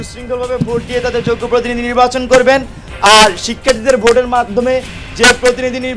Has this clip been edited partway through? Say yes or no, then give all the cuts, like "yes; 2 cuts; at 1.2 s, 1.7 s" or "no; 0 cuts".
no; 0 cuts